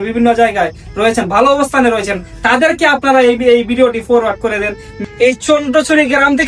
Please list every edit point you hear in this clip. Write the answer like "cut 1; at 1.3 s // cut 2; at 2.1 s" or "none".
cut 1; at 4.9 s